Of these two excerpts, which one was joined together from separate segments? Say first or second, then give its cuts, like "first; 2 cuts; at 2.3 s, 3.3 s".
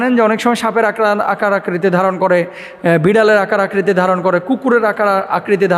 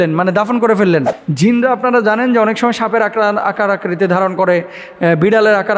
second; 1 cut; at 1.2 s